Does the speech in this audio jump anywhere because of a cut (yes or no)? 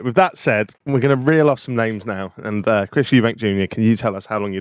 no